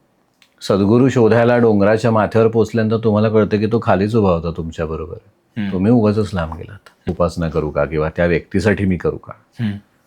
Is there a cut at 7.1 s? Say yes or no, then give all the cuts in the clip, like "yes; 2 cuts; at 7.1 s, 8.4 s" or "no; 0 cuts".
yes; 1 cut; at 7.1 s